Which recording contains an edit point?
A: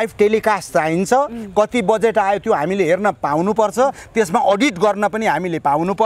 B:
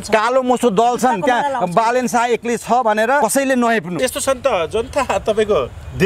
B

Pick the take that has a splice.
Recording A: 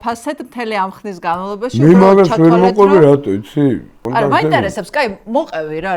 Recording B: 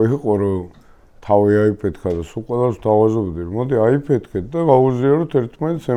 A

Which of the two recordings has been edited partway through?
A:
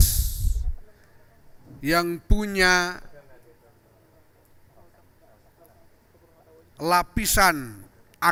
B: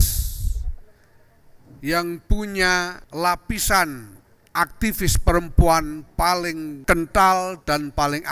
B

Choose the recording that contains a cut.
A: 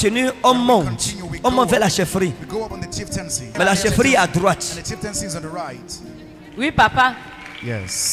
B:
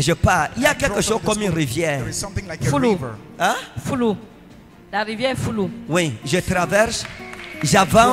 A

